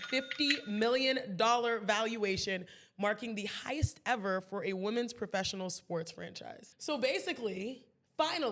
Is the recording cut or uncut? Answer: cut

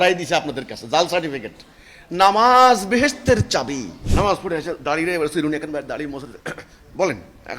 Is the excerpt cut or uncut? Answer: cut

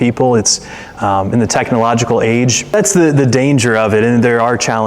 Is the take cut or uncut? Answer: cut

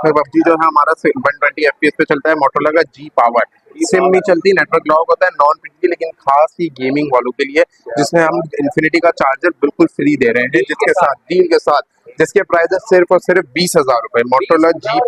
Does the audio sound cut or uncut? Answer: uncut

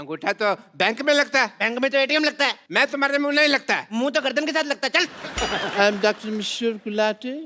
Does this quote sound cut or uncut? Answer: cut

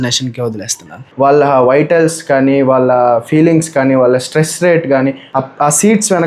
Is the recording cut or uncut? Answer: cut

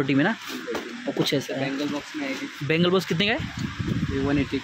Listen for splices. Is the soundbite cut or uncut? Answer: uncut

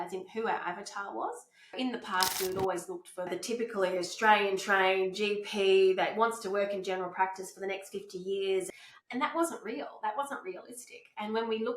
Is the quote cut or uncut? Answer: cut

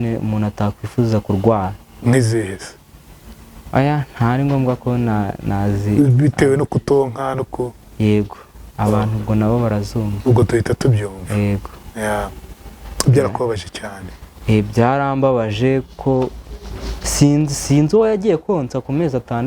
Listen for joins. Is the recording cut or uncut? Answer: uncut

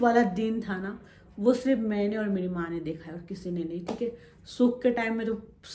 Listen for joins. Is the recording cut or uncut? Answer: uncut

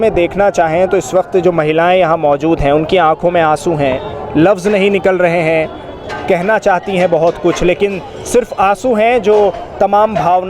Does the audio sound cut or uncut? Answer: uncut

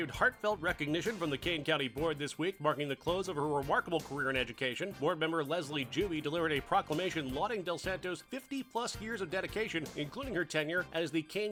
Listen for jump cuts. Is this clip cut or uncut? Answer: uncut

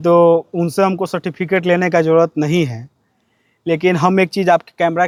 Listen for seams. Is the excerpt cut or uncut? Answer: uncut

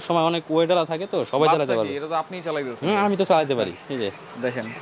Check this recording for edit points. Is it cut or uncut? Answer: uncut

